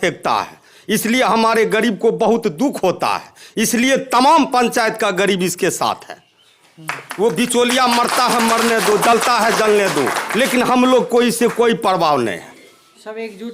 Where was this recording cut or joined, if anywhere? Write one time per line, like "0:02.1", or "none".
none